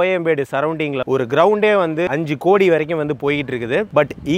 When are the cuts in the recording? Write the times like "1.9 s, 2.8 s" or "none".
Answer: 1.0 s, 2.1 s